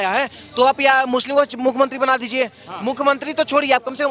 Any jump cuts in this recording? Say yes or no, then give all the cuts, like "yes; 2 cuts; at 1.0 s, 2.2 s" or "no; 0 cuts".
no; 0 cuts